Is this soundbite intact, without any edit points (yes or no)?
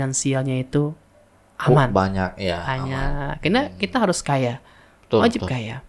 yes